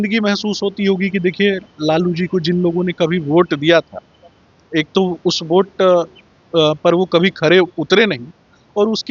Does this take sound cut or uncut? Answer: uncut